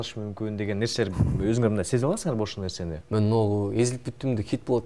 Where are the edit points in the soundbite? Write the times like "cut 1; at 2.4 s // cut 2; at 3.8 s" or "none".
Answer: cut 1; at 2.9 s